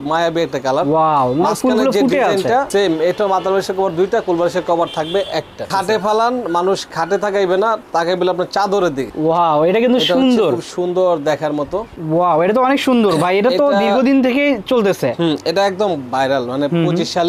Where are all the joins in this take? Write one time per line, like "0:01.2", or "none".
0:02.7
0:05.7
0:09.1
0:11.9